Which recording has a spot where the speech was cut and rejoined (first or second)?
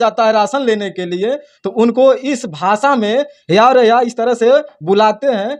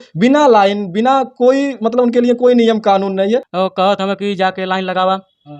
second